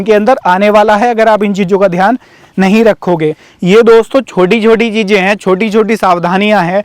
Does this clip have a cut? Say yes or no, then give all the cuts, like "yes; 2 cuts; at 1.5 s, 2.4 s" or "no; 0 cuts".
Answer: yes; 1 cut; at 3.5 s